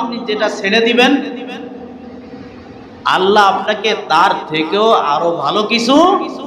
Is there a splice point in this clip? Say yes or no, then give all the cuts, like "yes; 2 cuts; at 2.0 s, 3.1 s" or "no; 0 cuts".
no; 0 cuts